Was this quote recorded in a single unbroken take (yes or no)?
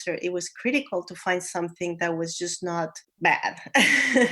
no